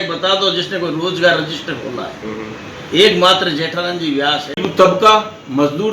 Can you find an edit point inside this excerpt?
yes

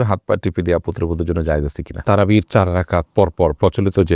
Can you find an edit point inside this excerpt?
yes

